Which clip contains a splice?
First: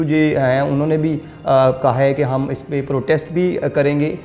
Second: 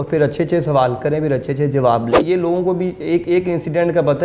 second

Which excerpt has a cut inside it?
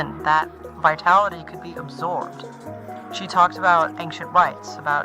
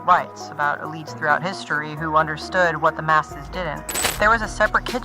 second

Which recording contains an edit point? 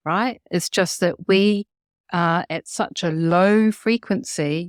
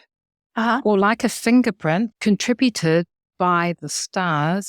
second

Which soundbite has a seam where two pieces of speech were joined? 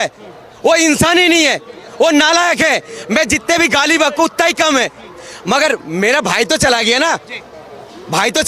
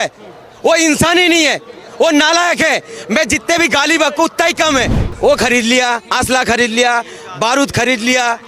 second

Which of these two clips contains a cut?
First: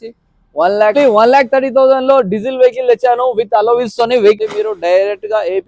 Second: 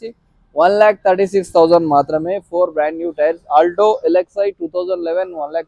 first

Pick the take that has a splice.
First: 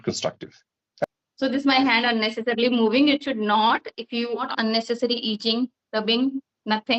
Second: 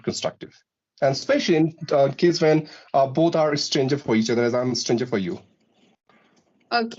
first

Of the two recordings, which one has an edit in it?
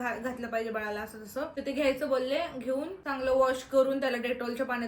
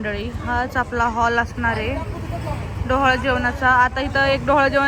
first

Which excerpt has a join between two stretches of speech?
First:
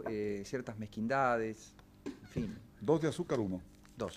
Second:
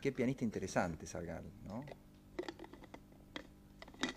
second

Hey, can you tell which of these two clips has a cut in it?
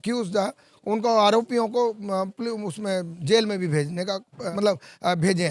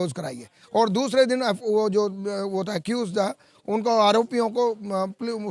first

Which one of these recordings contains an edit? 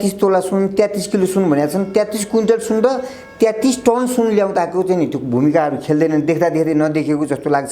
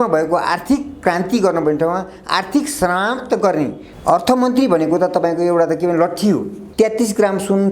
second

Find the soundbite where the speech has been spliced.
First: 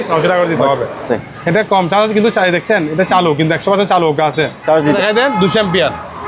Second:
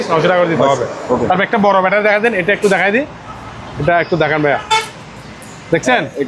first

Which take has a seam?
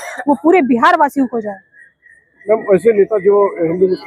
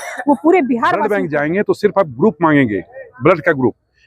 second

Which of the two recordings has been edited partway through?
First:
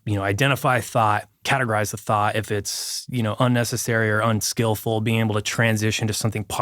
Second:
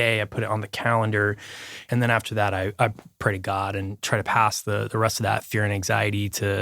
second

